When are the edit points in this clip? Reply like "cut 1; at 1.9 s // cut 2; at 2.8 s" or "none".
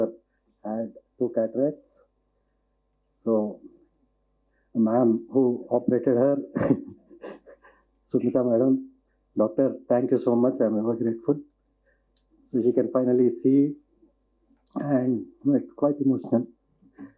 none